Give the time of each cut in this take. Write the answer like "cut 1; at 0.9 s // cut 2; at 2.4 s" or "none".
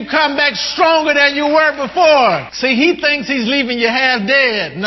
cut 1; at 2.5 s